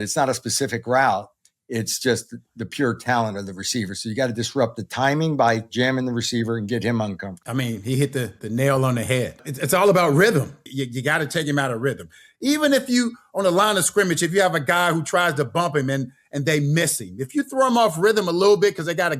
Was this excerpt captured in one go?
no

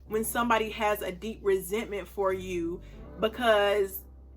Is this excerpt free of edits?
yes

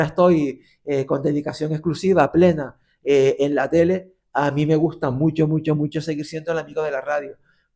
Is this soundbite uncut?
yes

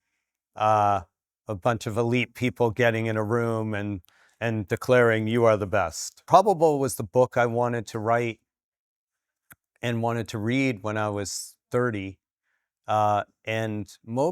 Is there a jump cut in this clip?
yes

